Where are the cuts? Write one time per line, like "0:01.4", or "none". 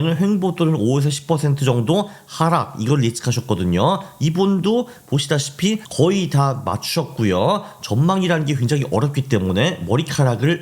none